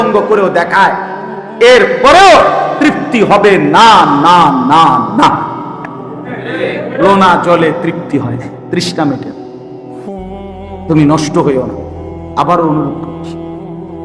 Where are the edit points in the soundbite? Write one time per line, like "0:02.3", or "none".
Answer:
0:09.3
0:10.9